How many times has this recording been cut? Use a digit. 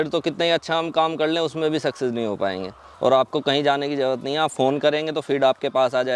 1